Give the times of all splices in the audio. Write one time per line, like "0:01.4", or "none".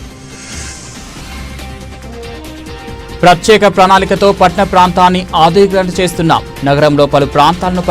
0:01.4